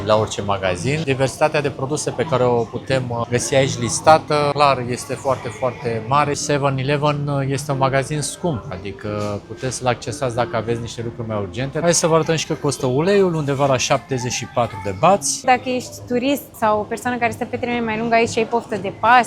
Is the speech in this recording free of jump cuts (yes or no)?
no